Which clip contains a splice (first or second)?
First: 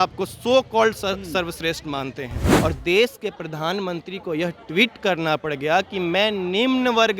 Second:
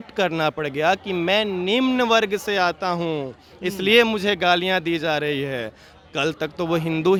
first